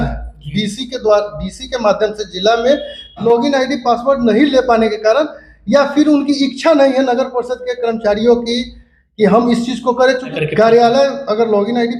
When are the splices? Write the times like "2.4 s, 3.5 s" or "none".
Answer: 3.2 s, 10.3 s